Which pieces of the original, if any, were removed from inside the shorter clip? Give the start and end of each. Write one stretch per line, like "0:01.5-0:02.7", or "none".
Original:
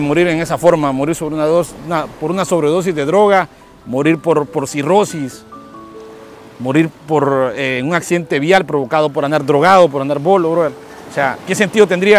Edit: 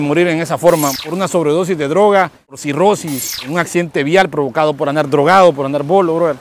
0:01.0-0:02.1
0:03.8-0:04.7
0:05.5-0:07.8